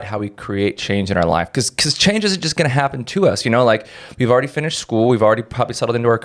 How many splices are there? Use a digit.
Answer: 0